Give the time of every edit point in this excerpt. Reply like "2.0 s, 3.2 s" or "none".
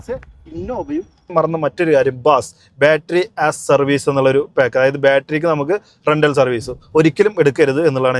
1.3 s